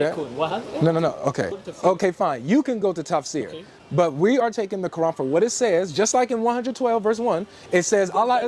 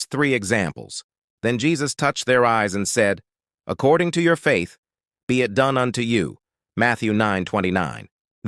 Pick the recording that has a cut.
first; 1 cut; at 1.6 s

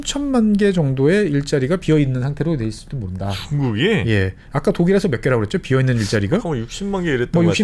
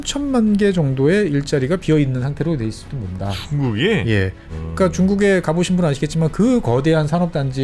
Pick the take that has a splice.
second; 1 cut; at 4.4 s

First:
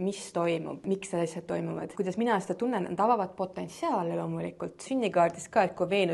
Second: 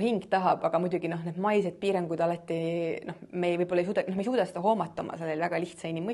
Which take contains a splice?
first; 3 cuts; at 0.8 s, 1.9 s, 4.9 s

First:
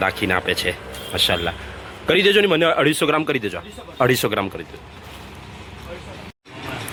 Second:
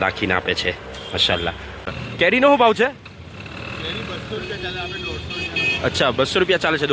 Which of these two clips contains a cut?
second; 1 cut; at 1.9 s

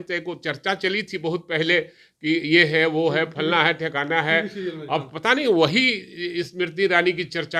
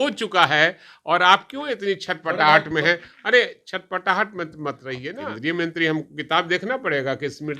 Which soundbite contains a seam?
second; 1 cut; at 5.1 s

